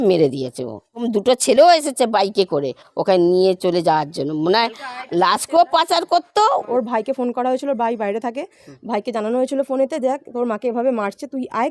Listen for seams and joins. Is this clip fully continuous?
no; 2 cuts; at 1.0 s, 6.7 s

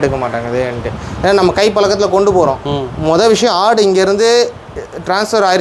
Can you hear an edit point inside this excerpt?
no; 0 cuts

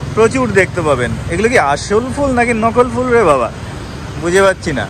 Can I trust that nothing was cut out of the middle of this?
yes; 0 cuts

